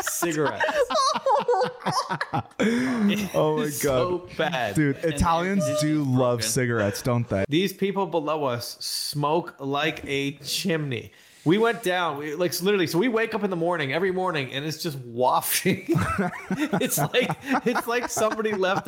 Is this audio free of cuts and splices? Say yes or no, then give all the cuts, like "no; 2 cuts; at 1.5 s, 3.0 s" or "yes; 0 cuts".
no; 1 cut; at 7.4 s